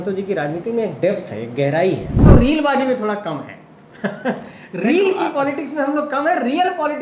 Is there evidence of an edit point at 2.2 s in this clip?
yes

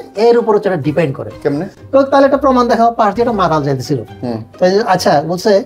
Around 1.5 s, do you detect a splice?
no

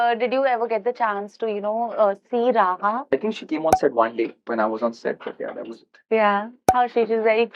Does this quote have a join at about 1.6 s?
no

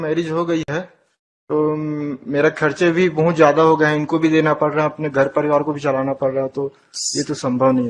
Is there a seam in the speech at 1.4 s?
no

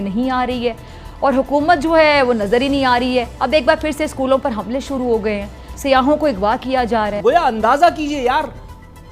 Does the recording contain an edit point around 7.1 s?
yes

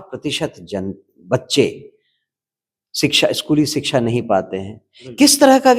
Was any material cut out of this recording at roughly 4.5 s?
no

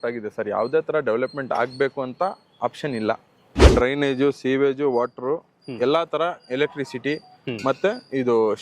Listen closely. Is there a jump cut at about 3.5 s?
yes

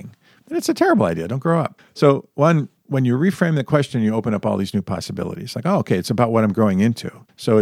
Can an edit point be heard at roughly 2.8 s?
yes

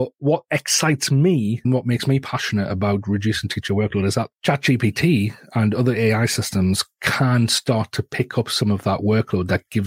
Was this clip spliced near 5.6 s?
no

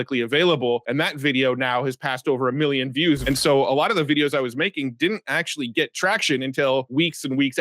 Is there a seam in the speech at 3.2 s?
yes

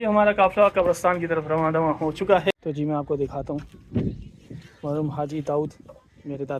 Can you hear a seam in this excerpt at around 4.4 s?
no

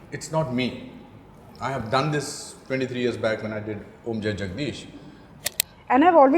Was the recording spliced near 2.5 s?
no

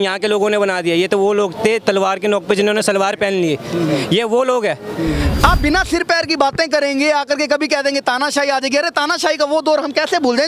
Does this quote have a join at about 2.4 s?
no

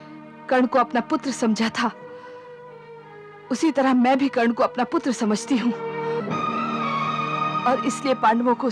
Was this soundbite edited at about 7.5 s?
yes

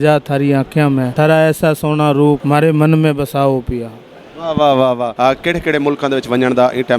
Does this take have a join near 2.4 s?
yes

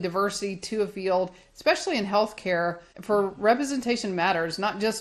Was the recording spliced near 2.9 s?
yes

